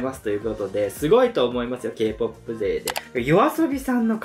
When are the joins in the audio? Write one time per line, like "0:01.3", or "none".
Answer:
0:03.0